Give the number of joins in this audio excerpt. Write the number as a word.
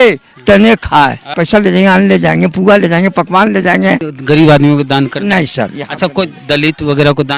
two